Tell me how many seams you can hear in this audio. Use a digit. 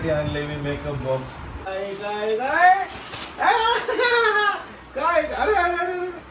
1